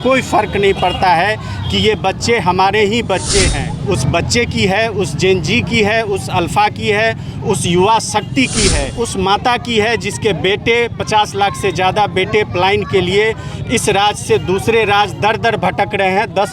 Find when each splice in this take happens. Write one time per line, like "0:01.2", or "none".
0:03.7
0:08.9

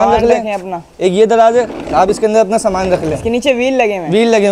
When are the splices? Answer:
none

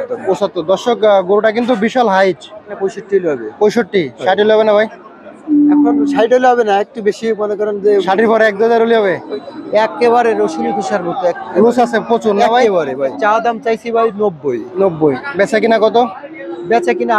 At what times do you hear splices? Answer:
0:02.7
0:09.3
0:13.2

